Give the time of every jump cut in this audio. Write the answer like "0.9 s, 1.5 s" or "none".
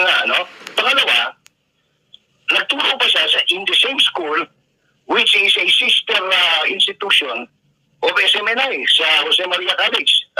none